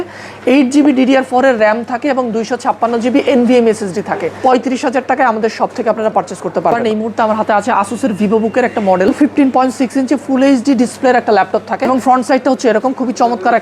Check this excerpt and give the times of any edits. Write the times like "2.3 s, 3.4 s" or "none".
4.3 s, 6.8 s, 9.2 s, 11.9 s